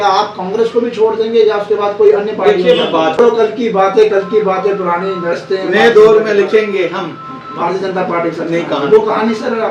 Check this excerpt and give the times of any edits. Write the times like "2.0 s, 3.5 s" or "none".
3.2 s